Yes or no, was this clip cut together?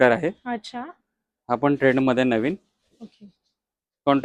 no